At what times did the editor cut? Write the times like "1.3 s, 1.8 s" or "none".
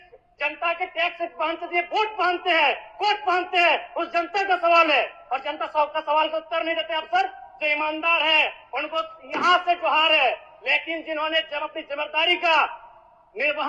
none